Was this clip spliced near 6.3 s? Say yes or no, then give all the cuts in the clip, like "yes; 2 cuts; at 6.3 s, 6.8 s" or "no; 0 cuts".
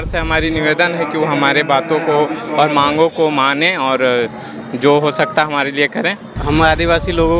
yes; 1 cut; at 6.3 s